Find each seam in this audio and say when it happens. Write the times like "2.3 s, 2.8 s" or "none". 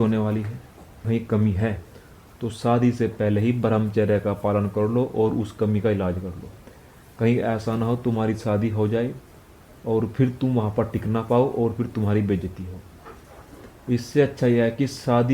1.0 s